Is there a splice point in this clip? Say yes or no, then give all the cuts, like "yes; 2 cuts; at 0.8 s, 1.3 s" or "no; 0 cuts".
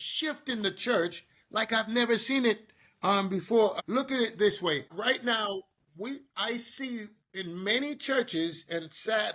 yes; 2 cuts; at 3.7 s, 4.9 s